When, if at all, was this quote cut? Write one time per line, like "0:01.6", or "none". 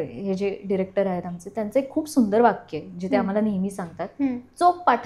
none